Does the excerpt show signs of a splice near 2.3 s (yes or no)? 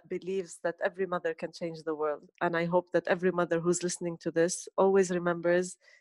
yes